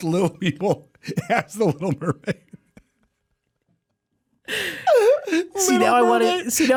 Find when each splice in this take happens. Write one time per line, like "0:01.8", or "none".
none